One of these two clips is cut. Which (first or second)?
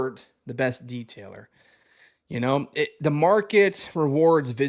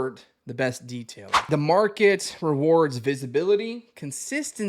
second